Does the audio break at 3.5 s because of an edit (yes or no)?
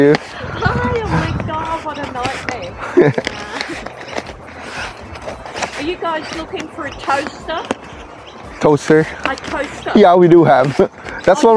no